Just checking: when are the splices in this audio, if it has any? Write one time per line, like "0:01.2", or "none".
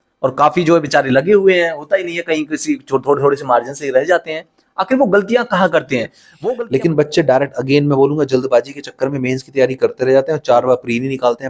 0:06.2